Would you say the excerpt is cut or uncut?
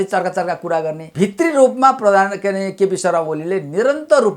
cut